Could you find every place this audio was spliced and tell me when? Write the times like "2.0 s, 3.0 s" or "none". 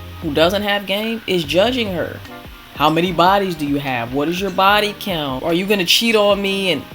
5.4 s